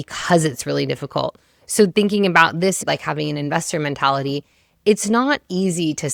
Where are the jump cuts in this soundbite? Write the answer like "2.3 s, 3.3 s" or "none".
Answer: none